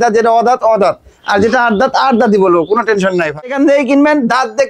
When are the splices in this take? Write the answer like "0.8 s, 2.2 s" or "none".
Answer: 3.5 s